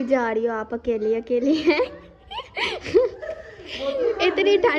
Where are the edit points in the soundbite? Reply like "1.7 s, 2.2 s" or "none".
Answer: none